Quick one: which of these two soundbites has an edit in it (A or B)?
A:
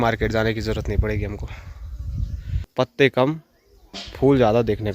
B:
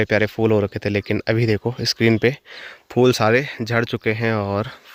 A